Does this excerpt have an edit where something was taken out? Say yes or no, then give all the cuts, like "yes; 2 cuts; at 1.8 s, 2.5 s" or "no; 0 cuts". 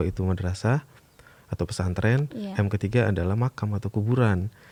no; 0 cuts